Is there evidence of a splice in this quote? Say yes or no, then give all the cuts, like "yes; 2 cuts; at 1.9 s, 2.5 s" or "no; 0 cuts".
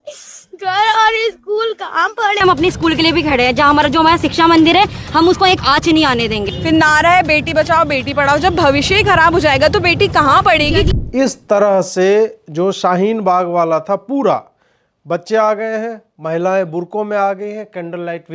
yes; 3 cuts; at 2.4 s, 6.6 s, 10.9 s